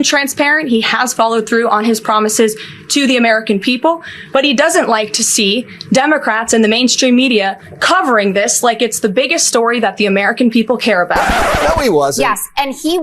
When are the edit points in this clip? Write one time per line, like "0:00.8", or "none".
0:11.4

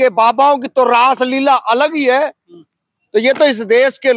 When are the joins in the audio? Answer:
none

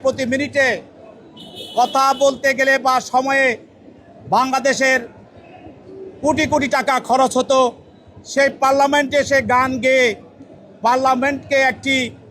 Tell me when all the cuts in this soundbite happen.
none

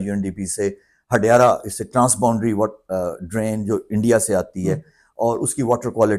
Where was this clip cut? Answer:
none

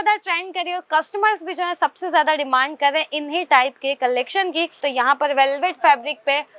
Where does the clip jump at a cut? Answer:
0:04.8

